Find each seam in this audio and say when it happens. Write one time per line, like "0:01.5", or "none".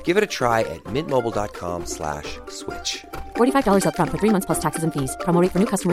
none